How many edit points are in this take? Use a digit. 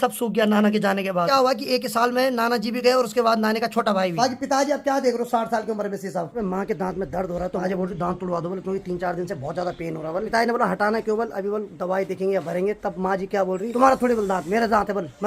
6